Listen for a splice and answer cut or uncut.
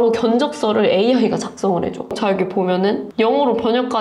cut